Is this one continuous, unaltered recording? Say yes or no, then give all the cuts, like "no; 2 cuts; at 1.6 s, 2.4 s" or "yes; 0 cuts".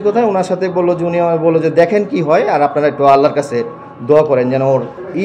yes; 0 cuts